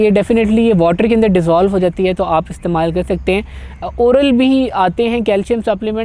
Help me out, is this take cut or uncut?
uncut